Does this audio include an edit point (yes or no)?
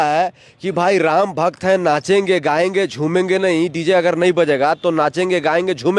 no